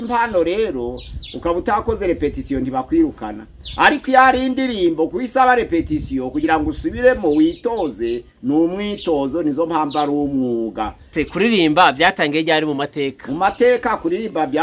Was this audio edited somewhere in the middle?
yes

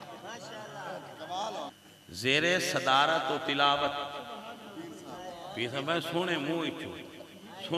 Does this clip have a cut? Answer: yes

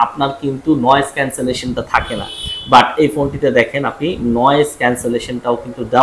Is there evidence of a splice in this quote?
no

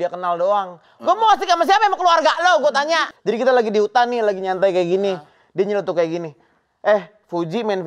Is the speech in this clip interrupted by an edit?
yes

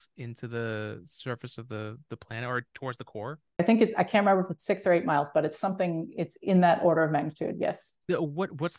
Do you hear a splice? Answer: yes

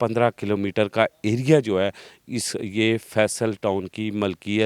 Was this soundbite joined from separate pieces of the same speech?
no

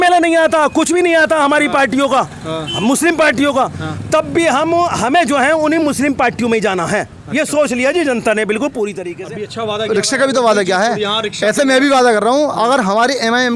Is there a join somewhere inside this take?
yes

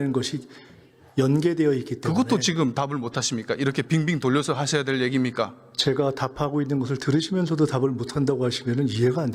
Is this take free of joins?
yes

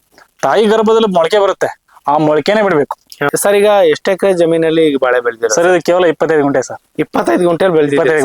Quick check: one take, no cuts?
no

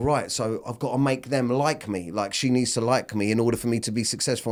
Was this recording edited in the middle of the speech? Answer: no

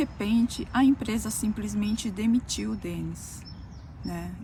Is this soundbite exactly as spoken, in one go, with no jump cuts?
yes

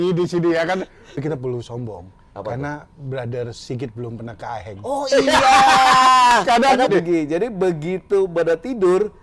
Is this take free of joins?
no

